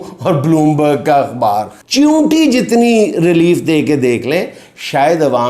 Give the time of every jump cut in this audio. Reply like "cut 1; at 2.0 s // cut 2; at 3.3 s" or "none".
cut 1; at 1.8 s